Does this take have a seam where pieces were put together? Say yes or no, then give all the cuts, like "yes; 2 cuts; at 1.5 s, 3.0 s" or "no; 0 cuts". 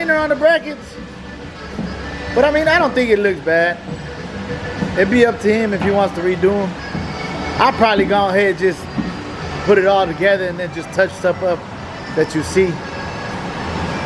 no; 0 cuts